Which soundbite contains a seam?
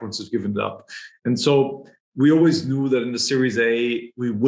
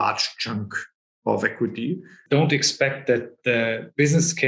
second; 1 cut; at 2.2 s

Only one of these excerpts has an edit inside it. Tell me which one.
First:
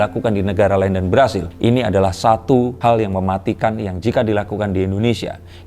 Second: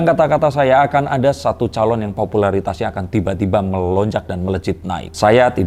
first; 2 cuts; at 1.5 s, 2.7 s

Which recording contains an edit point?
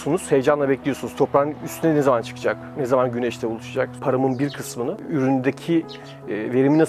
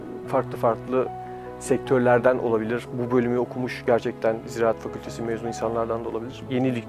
first; 2 cuts; at 4.0 s, 5.0 s

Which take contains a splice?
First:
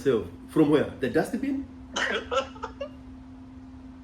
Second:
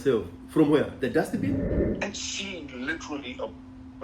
second; 1 cut; at 1.8 s

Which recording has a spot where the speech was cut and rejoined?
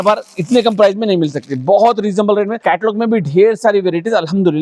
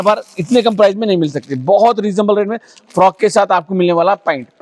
first; 1 cut; at 2.6 s

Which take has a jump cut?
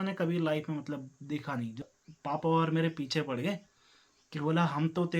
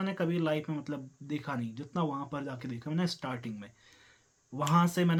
first; 1 cut; at 1.9 s

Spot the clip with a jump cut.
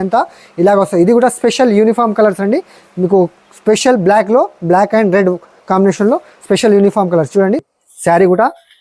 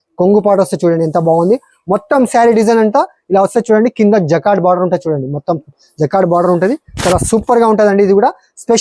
first; 1 cut; at 7.7 s

